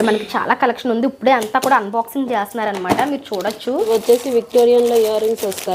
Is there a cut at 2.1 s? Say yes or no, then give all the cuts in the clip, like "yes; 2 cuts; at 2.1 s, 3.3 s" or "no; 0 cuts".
no; 1 cut; at 3.9 s